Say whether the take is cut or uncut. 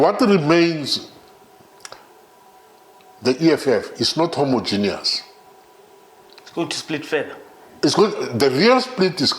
uncut